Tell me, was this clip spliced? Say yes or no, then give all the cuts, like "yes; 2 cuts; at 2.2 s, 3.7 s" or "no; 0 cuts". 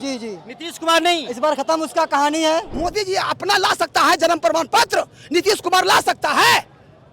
yes; 1 cut; at 2.7 s